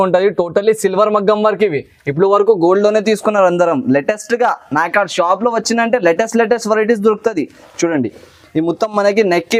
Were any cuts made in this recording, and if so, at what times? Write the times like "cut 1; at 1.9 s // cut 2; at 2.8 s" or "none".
none